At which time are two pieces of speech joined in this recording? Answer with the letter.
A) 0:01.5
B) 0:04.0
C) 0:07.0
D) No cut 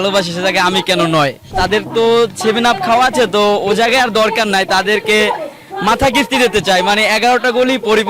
A